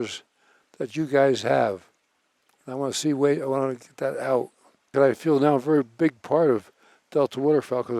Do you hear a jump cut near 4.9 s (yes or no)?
yes